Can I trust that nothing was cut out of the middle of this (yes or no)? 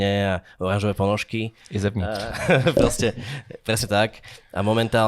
yes